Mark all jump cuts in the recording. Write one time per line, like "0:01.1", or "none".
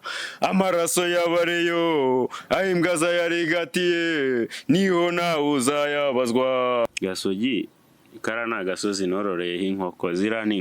0:06.9